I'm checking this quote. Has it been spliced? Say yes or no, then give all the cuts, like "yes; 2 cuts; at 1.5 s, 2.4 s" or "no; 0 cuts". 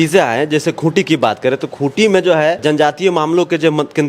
yes; 1 cut; at 2.6 s